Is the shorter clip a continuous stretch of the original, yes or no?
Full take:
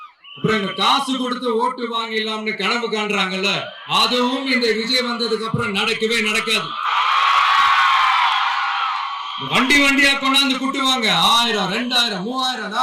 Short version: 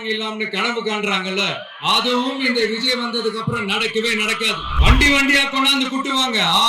no